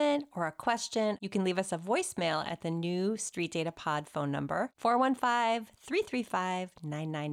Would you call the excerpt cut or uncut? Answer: cut